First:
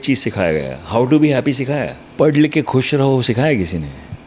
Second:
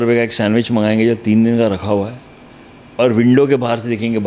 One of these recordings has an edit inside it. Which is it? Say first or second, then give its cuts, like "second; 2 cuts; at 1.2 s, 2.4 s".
first; 1 cut; at 2.0 s